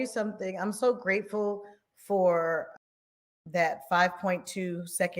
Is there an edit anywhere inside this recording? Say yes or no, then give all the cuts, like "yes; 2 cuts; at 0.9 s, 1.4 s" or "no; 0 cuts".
no; 0 cuts